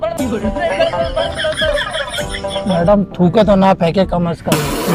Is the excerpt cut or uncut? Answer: uncut